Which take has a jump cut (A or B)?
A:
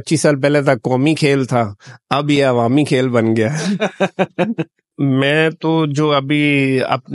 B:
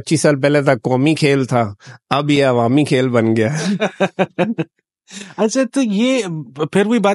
A